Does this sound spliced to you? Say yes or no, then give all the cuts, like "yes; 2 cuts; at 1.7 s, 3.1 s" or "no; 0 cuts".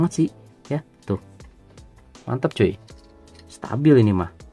no; 0 cuts